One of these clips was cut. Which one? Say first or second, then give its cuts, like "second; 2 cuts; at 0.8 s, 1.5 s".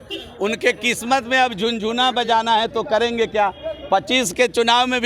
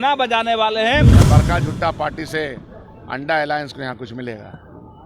second; 1 cut; at 1.2 s